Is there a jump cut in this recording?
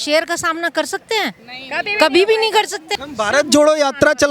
yes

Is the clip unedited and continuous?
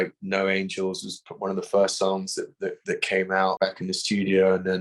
no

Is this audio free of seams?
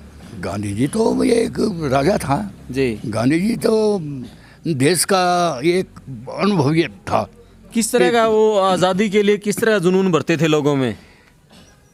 yes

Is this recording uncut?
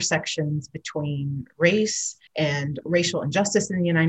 no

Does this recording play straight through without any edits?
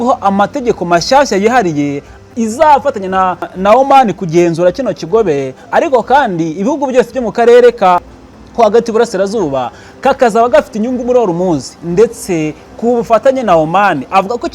no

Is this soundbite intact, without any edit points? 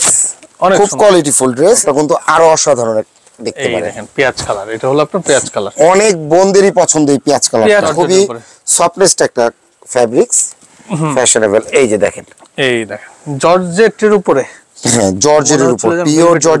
no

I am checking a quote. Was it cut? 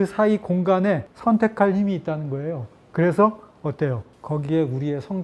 no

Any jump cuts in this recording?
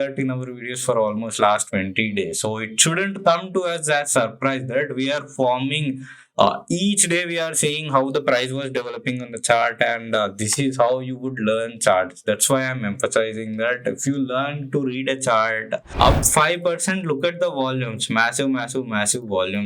yes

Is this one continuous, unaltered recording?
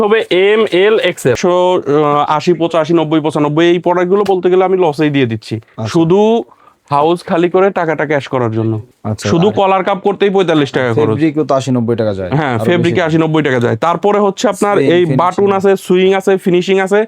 no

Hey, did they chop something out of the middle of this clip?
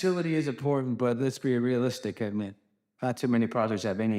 no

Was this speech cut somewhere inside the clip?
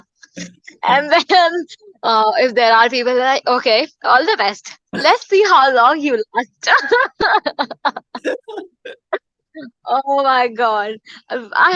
no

